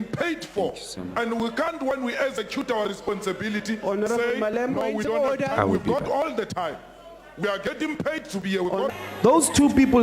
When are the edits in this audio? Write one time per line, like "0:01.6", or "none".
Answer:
0:08.9